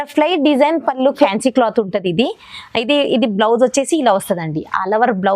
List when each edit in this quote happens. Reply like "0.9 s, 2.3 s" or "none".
1.3 s